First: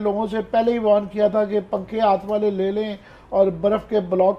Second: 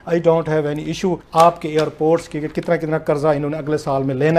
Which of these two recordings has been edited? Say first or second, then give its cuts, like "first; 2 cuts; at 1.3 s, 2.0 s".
second; 1 cut; at 1.2 s